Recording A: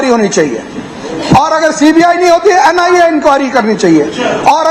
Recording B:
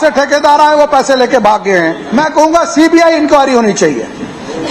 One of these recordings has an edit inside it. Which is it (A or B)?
B